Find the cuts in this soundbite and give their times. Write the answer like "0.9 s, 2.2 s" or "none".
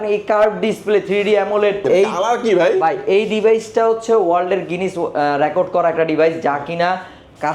1.8 s